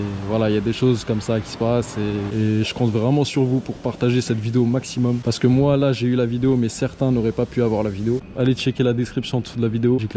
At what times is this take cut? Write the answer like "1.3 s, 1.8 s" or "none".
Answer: 2.3 s, 5.2 s, 8.3 s